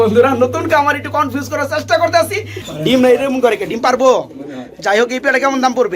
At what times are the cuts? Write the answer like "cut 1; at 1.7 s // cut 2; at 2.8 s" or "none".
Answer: cut 1; at 2.6 s